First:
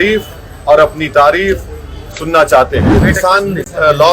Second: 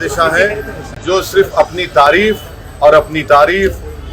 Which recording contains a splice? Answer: first; 1 cut; at 3.0 s

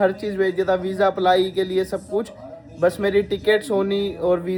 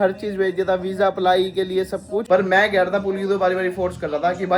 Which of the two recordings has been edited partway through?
second; 1 cut; at 2.2 s

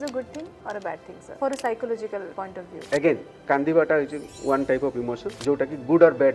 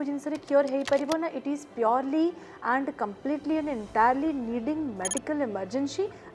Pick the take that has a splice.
first; 3 cuts; at 1.2 s, 2.4 s, 5.3 s

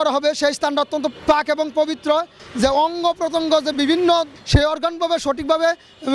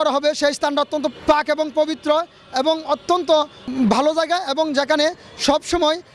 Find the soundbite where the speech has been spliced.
first; 2 cuts; at 2.4 s, 4.4 s

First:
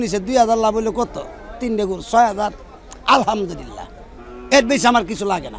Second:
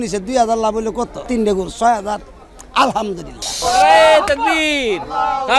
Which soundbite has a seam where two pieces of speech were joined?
second; 2 cuts; at 1.2 s, 3.6 s

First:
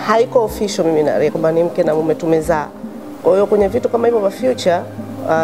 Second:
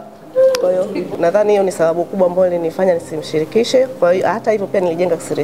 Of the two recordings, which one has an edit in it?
second; 1 cut; at 1.1 s

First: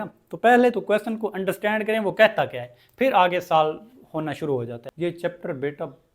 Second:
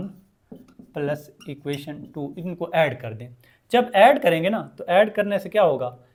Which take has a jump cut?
first; 1 cut; at 4.8 s

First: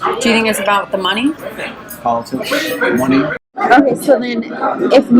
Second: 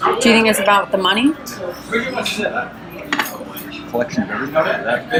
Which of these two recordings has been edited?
first; 2 cuts; at 1.5 s, 3.5 s

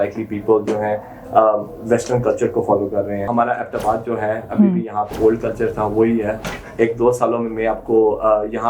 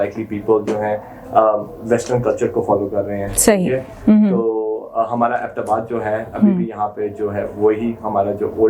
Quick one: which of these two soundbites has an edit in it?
first; 3 cuts; at 3.3 s, 5.1 s, 6.4 s

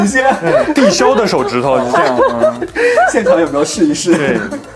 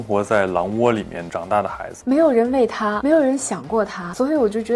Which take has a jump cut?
second; 2 cuts; at 1.9 s, 3.0 s

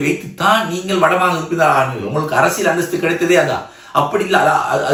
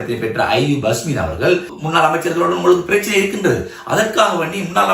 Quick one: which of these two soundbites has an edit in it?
second; 1 cut; at 1.7 s

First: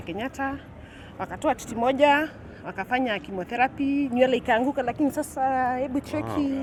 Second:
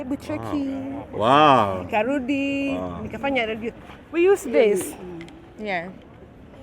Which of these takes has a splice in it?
second; 1 cut; at 3.7 s

